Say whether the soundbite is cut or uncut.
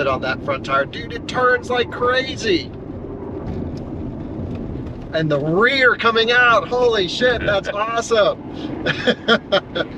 uncut